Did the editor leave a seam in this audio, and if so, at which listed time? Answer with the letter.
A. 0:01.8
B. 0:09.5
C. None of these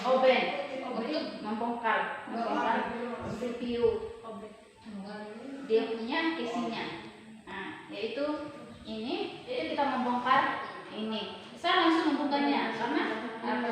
B